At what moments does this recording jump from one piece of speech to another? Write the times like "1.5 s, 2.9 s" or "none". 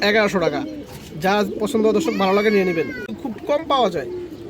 3.2 s